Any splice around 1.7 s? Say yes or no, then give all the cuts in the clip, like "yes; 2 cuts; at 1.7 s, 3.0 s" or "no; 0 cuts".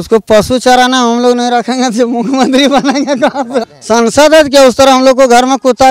no; 1 cut; at 3.7 s